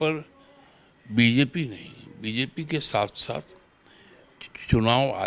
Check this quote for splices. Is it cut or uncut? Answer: uncut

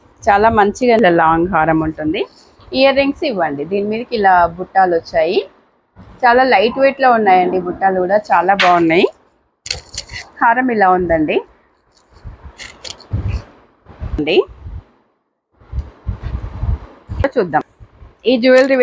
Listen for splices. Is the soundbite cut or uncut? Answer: cut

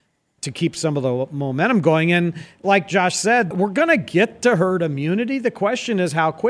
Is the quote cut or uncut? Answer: uncut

